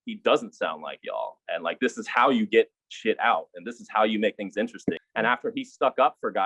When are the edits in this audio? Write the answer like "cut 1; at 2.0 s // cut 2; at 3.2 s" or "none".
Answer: none